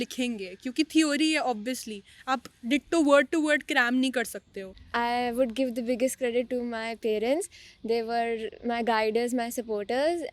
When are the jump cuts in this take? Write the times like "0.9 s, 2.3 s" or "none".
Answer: 4.7 s